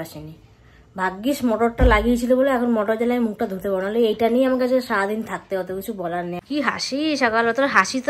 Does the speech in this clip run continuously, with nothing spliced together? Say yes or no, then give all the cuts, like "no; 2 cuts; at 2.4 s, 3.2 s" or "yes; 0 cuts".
no; 1 cut; at 6.4 s